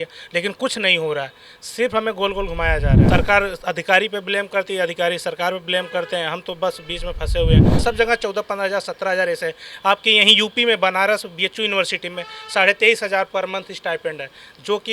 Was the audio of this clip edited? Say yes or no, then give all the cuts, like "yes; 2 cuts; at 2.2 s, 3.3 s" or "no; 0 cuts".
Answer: yes; 2 cuts; at 3.0 s, 7.7 s